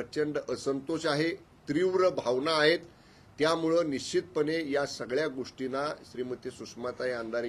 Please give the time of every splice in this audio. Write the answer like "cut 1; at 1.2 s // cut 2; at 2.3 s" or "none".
none